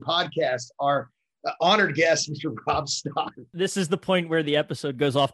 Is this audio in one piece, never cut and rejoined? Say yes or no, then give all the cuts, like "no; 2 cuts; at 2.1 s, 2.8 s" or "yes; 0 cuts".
no; 1 cut; at 3.3 s